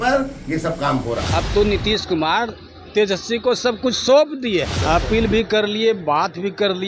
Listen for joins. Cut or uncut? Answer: cut